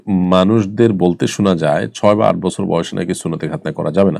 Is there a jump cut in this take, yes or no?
no